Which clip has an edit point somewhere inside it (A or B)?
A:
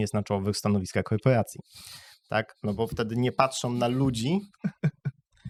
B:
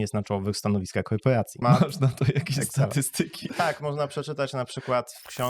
B